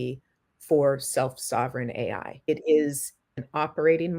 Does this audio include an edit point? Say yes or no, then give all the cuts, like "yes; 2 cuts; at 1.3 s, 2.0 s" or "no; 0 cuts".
yes; 2 cuts; at 2.3 s, 3.3 s